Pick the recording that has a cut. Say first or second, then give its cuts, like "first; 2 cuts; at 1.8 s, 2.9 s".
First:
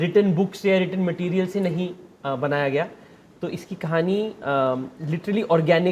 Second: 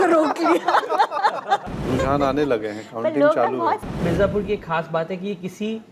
second; 2 cuts; at 1.7 s, 3.9 s